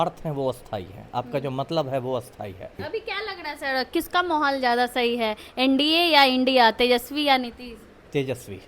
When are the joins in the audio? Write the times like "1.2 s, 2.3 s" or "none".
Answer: 2.8 s